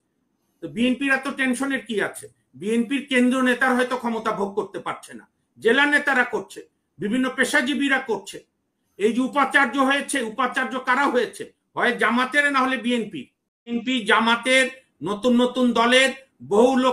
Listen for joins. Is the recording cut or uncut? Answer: cut